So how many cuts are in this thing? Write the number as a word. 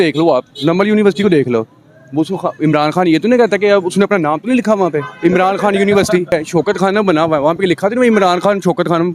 one